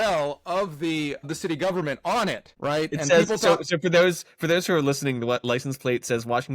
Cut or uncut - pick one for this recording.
cut